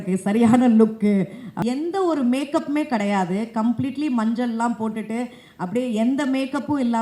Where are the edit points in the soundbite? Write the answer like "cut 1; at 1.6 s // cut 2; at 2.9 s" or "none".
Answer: cut 1; at 1.4 s